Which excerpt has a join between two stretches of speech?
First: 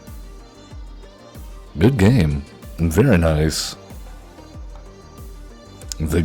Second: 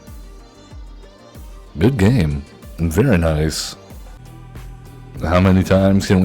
second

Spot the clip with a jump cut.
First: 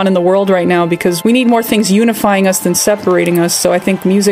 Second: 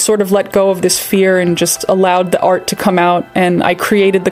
first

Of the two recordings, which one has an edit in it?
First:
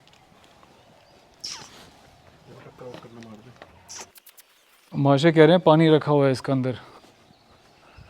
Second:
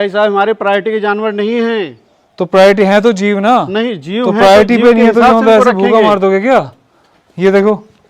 first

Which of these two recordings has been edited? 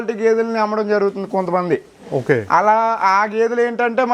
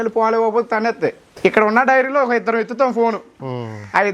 second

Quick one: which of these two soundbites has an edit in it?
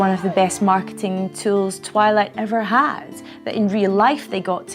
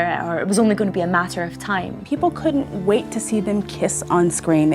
second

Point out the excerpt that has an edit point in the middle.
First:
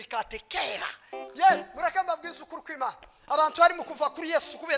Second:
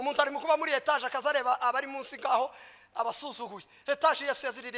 first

